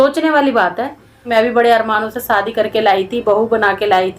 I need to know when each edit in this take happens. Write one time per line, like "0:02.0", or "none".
0:01.3